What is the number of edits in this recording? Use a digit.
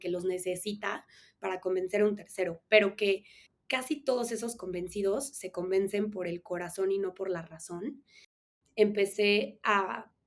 1